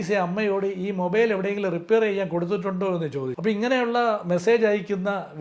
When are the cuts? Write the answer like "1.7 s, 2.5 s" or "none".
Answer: 3.3 s